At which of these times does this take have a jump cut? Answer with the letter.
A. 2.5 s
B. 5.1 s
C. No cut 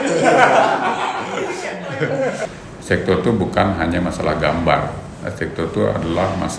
A